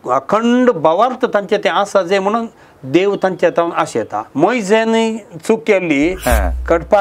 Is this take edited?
yes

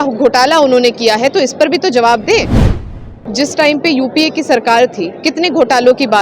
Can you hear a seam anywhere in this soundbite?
yes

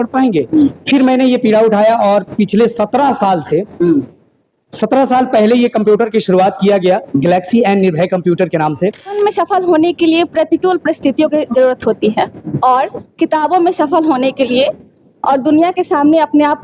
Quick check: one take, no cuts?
no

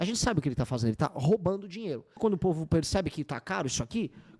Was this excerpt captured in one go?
no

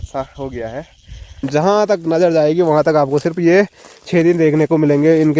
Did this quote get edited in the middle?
yes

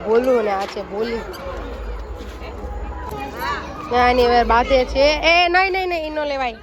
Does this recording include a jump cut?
no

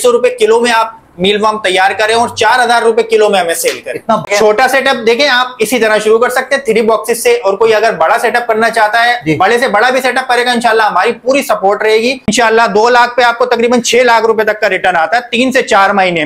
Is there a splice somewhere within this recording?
yes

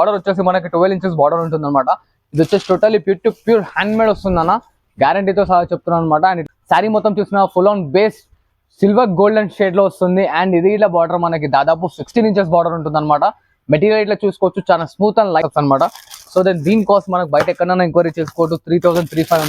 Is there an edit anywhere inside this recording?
yes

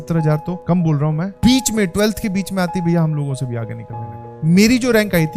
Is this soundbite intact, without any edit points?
no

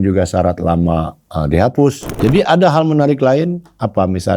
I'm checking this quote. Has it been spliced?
yes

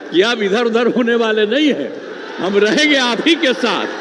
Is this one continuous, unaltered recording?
yes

